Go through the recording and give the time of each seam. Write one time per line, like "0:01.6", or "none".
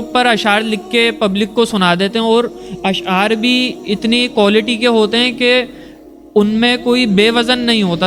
none